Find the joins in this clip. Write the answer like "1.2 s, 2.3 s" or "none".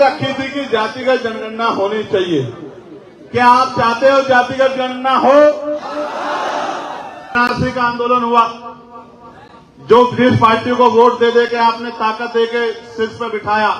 7.3 s